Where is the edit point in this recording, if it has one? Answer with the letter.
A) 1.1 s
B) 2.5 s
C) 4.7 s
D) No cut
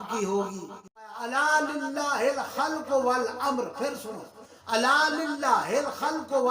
A